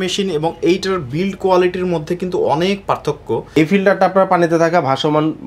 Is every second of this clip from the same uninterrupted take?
no; 1 cut; at 3.5 s

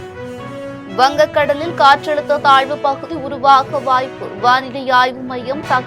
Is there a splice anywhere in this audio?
yes; 1 cut; at 0.9 s

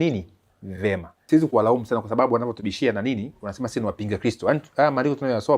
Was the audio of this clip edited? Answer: yes; 1 cut; at 1.2 s

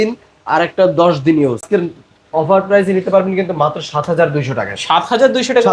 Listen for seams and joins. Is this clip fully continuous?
no; 1 cut; at 1.6 s

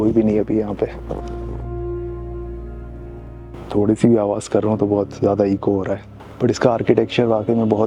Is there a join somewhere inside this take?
no; 0 cuts

